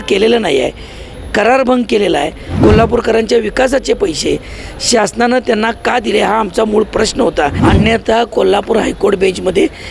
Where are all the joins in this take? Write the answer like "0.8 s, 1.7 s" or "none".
2.4 s, 7.6 s